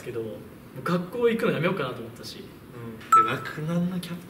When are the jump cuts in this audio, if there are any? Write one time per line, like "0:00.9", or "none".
0:03.0